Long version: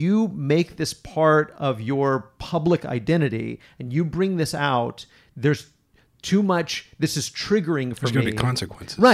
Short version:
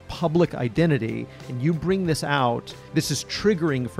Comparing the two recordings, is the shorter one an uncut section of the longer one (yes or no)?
no